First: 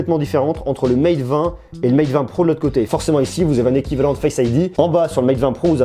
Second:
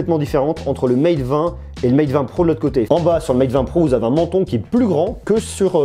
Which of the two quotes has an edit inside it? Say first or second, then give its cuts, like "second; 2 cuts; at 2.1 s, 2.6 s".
second; 1 cut; at 2.9 s